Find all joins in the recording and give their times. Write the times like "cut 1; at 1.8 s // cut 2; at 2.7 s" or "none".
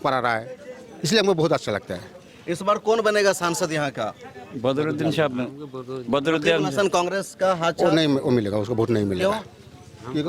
none